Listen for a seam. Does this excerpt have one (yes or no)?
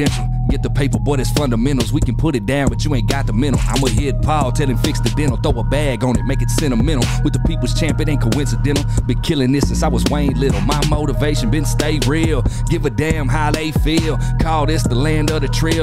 no